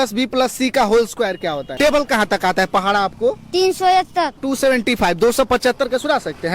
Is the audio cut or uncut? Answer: cut